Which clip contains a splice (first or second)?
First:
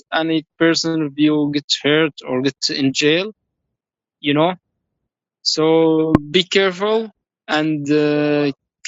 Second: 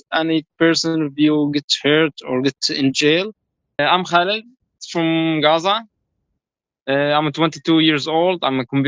second